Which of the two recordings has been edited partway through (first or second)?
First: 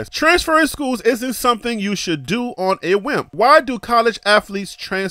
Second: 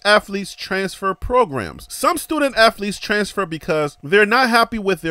first